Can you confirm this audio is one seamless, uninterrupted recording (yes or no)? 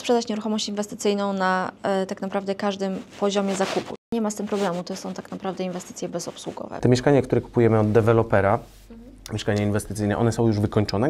no